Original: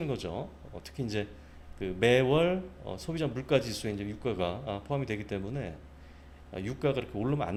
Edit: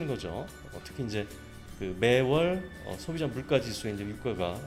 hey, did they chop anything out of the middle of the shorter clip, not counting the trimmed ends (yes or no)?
no